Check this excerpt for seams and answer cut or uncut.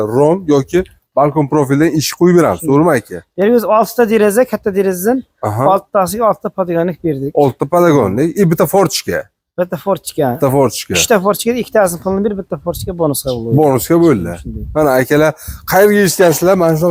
uncut